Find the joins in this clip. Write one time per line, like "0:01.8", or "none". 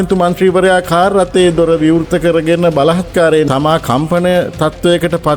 0:03.5